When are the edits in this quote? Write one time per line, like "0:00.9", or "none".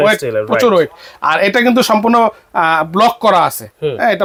none